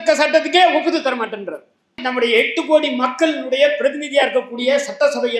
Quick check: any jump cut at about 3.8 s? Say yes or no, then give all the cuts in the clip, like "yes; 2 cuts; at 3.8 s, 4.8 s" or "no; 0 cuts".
no; 1 cut; at 2.0 s